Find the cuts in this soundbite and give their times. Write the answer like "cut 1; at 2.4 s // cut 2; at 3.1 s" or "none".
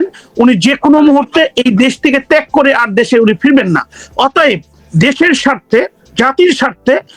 none